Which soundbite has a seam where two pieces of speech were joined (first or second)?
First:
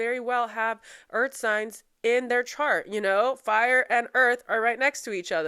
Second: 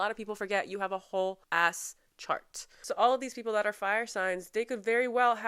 second